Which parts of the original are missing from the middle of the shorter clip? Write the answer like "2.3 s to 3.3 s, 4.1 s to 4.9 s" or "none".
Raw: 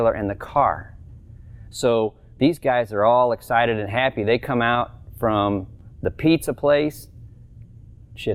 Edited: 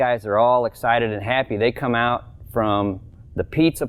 none

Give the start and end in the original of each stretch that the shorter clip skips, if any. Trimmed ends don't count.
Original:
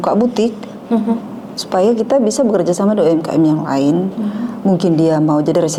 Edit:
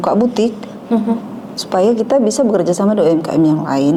none

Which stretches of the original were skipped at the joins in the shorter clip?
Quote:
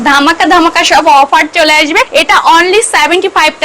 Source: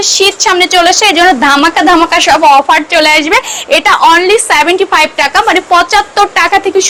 3.5 s to 3.7 s

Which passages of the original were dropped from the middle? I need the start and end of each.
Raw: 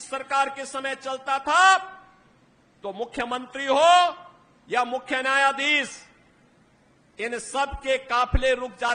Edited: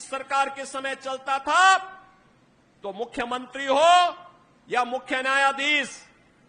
none

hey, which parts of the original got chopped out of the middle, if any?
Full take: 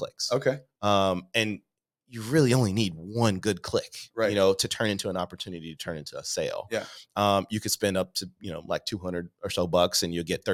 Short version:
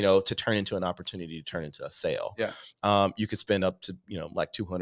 none

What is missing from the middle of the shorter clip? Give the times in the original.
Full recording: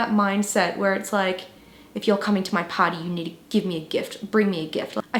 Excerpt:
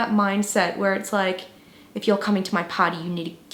none

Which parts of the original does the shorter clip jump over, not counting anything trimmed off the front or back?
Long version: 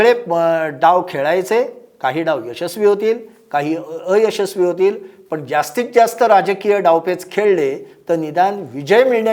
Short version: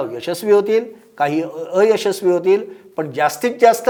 none

